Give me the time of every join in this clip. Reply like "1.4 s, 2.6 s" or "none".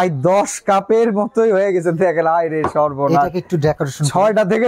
none